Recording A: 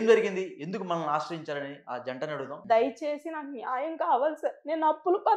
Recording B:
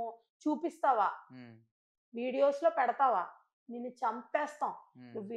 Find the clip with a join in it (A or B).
A